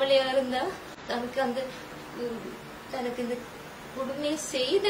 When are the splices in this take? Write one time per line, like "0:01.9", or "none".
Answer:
0:00.9